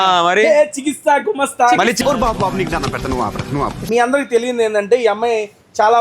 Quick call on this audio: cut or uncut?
cut